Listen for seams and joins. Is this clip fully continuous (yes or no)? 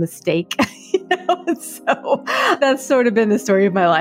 no